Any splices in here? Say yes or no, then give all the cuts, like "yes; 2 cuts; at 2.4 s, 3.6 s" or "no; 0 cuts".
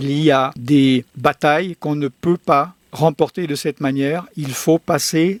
no; 0 cuts